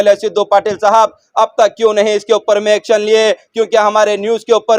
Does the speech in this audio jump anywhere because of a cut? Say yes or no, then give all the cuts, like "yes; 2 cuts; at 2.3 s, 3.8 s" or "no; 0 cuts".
no; 0 cuts